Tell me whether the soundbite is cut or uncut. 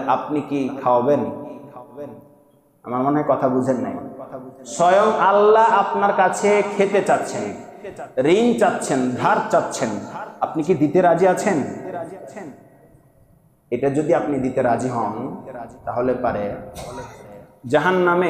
uncut